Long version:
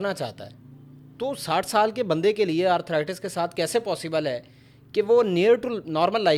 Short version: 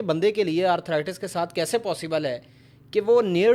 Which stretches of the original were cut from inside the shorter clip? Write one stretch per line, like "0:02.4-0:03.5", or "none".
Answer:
none